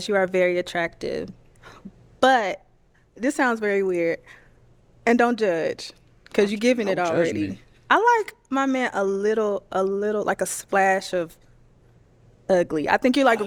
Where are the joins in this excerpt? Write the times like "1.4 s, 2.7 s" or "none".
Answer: none